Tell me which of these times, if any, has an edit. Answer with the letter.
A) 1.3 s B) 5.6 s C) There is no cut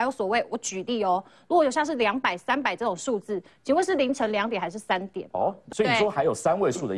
B